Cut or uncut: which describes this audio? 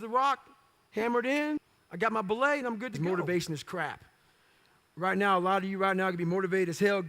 cut